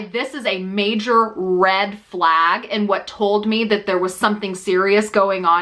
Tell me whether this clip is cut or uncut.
uncut